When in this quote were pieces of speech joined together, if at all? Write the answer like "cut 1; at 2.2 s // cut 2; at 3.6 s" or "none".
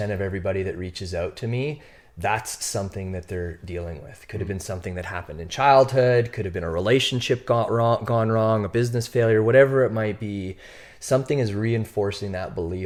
none